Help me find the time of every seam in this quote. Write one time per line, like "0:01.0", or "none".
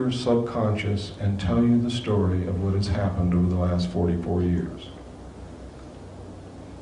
0:01.2